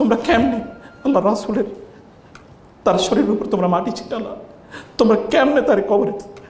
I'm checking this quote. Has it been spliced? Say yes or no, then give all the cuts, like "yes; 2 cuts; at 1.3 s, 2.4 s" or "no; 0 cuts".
no; 0 cuts